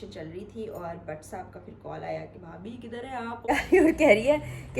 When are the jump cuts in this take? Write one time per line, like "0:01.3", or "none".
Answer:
0:03.5